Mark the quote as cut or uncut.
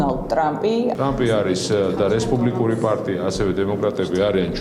cut